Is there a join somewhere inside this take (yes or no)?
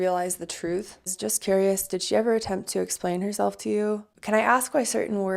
yes